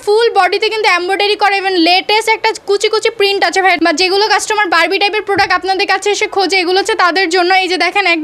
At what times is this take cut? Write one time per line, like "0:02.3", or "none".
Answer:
0:03.8